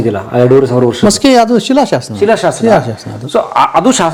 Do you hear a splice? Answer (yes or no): no